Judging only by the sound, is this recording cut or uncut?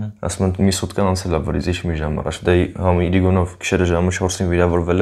uncut